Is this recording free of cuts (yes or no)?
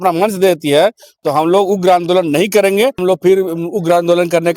no